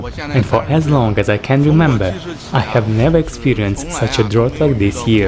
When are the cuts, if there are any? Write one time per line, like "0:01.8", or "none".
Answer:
none